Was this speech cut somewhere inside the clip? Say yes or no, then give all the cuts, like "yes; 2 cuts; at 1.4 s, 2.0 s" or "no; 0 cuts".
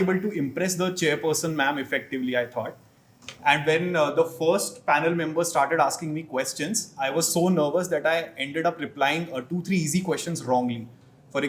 no; 0 cuts